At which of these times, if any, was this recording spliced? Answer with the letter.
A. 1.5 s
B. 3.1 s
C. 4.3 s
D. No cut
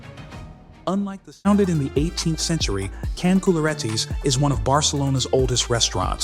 A